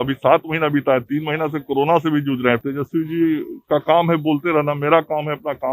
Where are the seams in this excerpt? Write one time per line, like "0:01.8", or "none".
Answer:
0:02.6